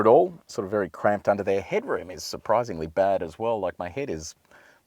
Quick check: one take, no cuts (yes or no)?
yes